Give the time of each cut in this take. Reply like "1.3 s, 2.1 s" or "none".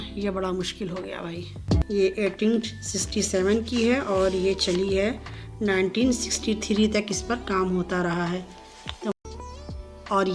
1.8 s, 9.1 s